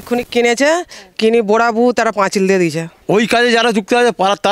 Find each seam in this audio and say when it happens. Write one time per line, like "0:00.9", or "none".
0:02.9